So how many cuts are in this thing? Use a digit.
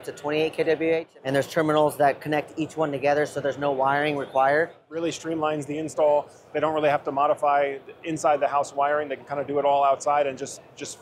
2